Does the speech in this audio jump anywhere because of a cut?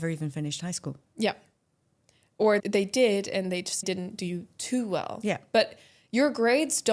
yes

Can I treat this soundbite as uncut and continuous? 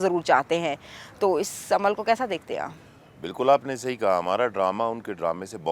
yes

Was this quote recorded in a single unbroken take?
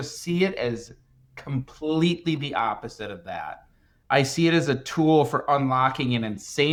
yes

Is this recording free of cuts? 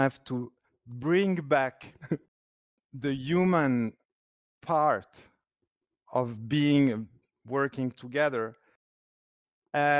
yes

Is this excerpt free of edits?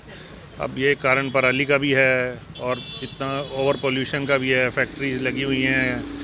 yes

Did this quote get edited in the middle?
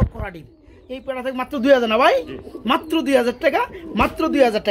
no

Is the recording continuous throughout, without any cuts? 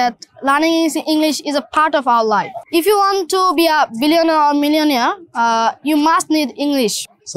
yes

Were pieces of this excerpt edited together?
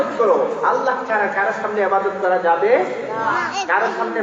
no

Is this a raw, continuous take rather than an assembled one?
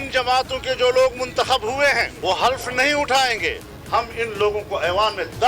no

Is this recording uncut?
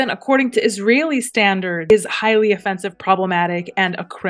no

